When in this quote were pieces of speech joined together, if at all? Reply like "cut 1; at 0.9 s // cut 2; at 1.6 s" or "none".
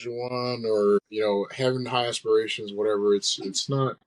cut 1; at 1.1 s